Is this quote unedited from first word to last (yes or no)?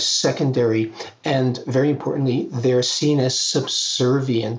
yes